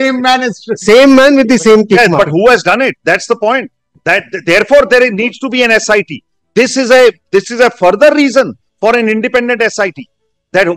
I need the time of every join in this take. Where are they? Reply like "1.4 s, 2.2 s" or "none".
none